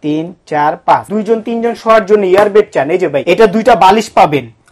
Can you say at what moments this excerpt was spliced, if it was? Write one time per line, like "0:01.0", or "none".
0:01.1
0:03.2